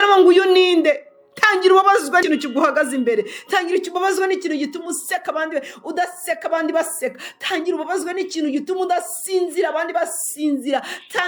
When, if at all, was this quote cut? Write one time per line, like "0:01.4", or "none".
0:02.2

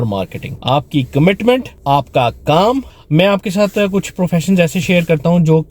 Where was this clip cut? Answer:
0:02.9

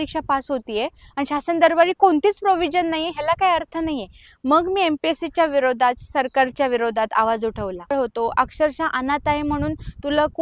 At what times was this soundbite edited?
0:07.9

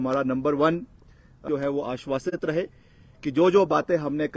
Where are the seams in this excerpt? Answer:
0:01.4

